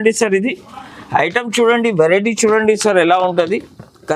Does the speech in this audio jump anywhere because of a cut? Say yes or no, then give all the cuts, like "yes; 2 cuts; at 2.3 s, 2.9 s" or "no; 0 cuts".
no; 0 cuts